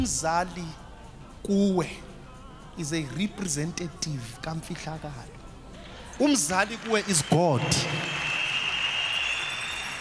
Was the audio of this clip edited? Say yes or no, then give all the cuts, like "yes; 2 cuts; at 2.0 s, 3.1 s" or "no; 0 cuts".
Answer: no; 0 cuts